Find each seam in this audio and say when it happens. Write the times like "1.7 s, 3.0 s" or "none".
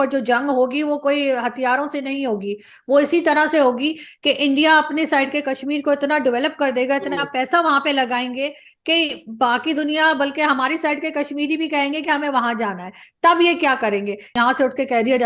14.3 s